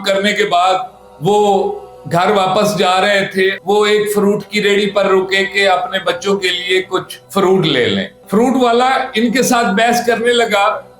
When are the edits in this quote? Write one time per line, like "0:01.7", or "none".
0:03.6
0:08.1